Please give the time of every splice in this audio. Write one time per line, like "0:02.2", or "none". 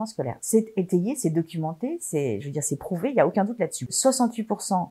0:03.8